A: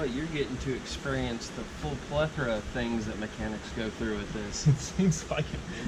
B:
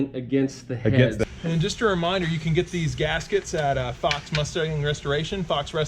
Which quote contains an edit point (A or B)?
B